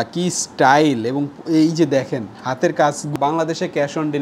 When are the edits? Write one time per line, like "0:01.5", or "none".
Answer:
0:03.1